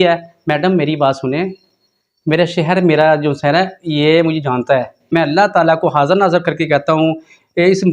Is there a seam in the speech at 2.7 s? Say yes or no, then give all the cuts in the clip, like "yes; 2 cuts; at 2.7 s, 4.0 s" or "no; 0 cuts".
no; 1 cut; at 5.1 s